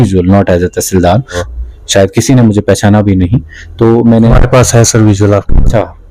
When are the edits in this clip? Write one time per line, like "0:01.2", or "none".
0:01.4